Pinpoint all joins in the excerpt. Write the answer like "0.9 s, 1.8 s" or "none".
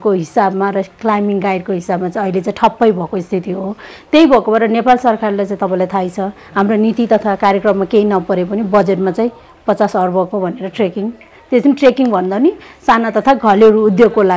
none